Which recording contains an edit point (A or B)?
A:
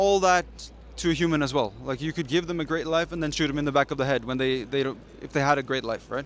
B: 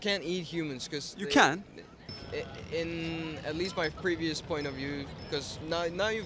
B